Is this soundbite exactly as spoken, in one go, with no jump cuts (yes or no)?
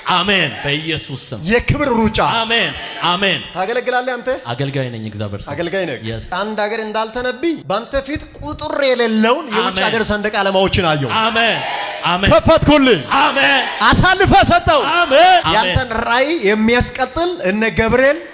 no